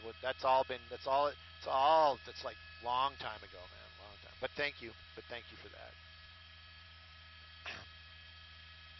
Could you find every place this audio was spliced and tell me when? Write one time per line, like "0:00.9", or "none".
0:01.6